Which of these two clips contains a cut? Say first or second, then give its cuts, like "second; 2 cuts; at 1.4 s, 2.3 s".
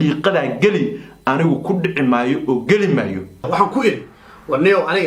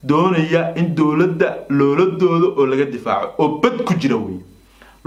first; 1 cut; at 3.3 s